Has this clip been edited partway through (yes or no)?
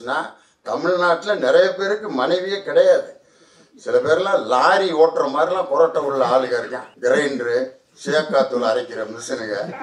yes